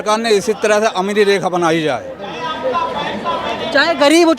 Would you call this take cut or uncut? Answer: uncut